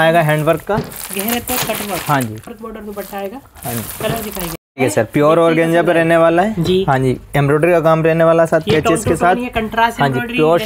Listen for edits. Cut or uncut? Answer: cut